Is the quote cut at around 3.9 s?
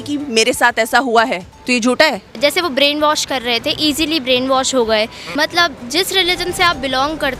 no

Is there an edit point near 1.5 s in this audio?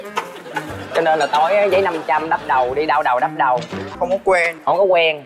no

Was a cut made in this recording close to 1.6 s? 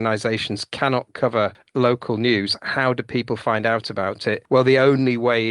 yes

